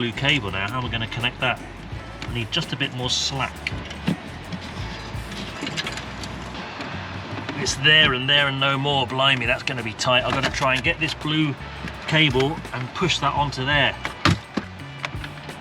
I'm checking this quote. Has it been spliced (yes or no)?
no